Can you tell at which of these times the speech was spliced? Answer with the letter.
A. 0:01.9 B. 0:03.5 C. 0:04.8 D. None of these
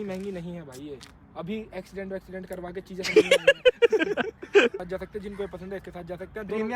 C